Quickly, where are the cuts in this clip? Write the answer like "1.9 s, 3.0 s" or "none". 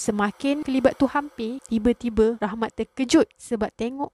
none